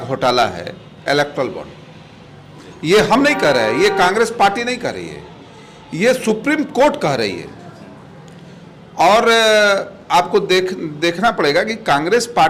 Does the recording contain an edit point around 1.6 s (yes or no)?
no